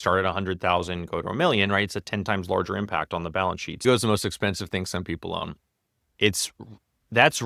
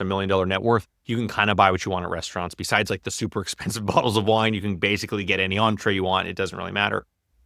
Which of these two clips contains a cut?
first; 1 cut; at 3.8 s

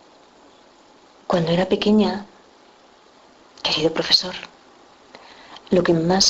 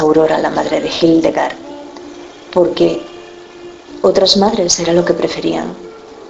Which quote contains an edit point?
first; 1 cut; at 0.9 s

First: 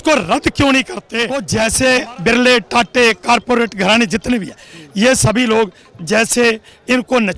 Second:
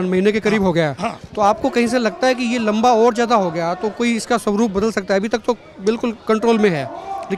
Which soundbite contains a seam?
first; 1 cut; at 1.4 s

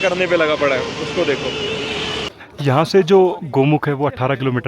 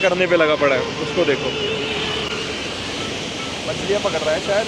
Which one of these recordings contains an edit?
first; 1 cut; at 2.3 s

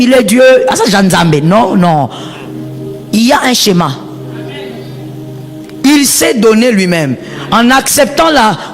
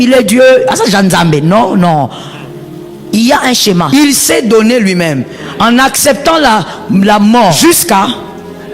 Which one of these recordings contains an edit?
second; 2 cuts; at 3.9 s, 7.6 s

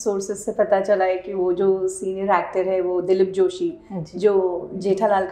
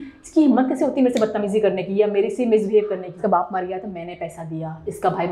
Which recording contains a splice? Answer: second; 1 cut; at 3.2 s

